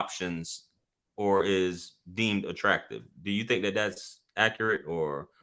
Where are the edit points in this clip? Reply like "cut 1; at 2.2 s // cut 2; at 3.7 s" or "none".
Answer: none

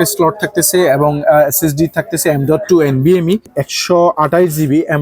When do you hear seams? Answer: cut 1; at 3.6 s

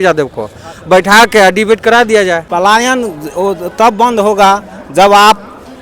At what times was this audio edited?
cut 1; at 2.4 s

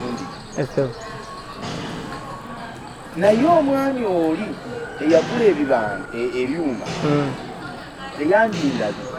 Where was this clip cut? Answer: none

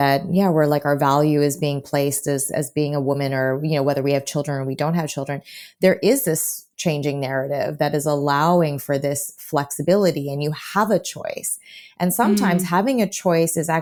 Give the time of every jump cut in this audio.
none

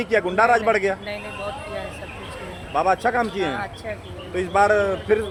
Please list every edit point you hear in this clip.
none

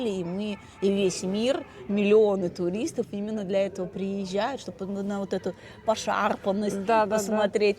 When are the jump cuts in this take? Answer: none

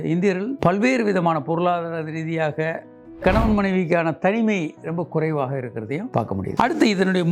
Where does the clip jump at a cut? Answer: cut 1; at 3.2 s

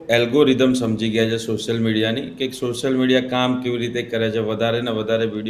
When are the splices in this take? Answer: none

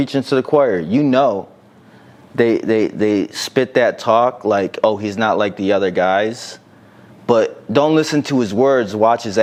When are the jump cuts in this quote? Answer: none

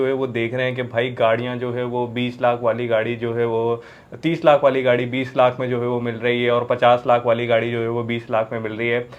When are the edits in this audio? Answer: none

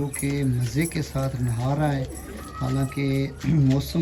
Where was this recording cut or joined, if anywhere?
none

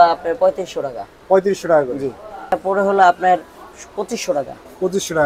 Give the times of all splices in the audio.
cut 1; at 2.5 s

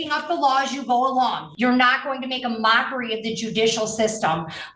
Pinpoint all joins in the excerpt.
cut 1; at 1.5 s

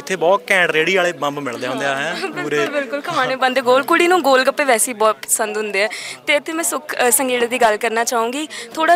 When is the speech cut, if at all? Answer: none

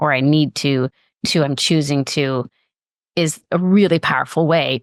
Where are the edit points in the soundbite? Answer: none

